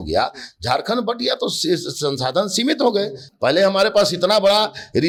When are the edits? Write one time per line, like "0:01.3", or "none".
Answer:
none